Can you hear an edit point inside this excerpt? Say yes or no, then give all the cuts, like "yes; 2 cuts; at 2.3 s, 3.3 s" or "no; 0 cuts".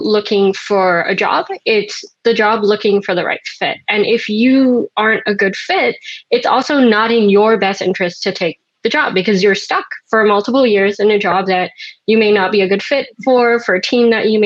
no; 0 cuts